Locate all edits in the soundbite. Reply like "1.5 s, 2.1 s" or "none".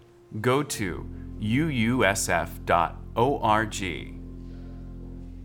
4.0 s